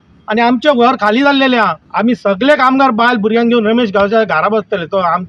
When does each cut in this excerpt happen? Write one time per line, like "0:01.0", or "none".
0:01.8